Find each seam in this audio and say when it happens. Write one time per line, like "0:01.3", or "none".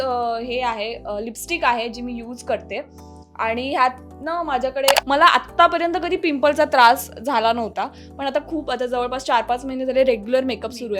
0:05.0

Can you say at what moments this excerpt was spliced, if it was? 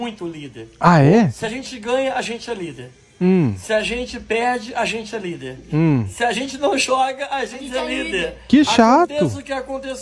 none

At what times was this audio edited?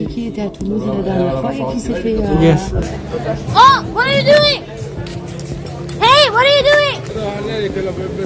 0:02.8
0:07.1

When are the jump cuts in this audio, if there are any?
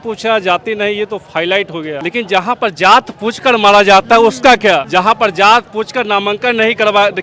0:02.0
0:04.9

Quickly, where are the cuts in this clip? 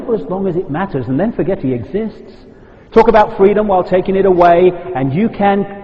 0:04.6

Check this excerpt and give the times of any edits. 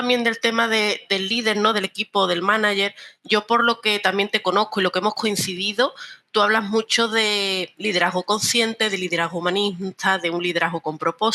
none

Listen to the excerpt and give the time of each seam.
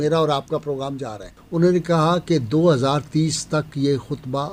0:01.3

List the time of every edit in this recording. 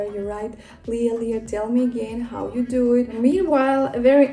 0:03.1

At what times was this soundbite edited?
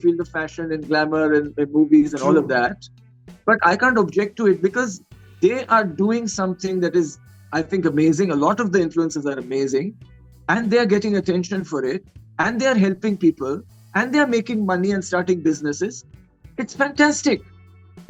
none

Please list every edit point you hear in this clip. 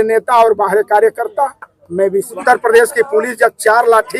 0:02.3

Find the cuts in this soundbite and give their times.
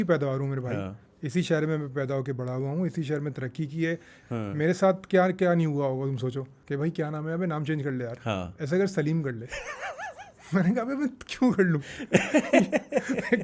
0:04.2
0:06.5

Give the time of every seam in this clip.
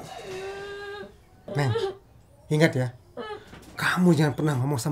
0:01.5

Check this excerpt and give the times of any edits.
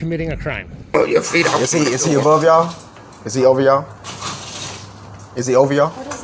0:00.9

